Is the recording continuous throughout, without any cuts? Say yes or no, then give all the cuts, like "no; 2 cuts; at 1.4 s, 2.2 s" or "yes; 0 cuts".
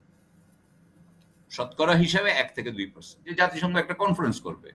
no; 1 cut; at 3.2 s